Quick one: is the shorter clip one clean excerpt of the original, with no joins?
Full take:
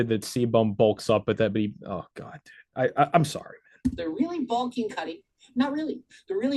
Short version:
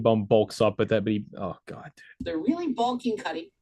no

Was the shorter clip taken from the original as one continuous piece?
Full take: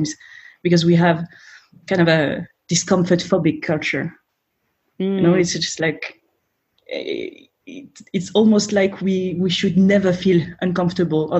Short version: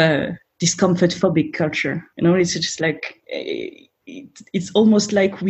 no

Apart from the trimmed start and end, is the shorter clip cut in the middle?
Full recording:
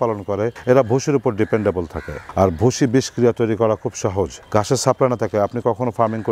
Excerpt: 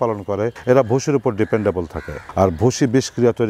no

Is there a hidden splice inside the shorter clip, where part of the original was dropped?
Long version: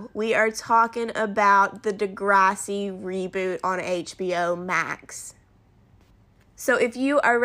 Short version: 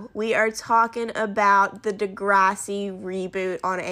no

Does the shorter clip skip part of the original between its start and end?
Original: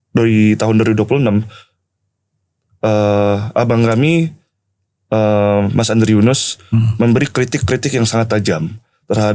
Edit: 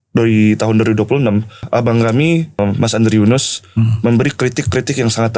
yes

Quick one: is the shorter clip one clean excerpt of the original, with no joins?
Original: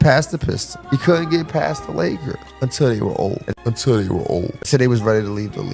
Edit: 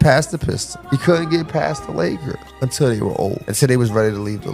no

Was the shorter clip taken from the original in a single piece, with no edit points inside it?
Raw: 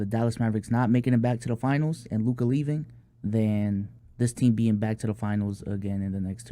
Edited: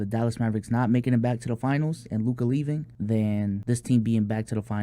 no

